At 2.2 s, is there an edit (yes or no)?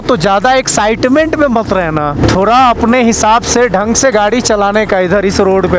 yes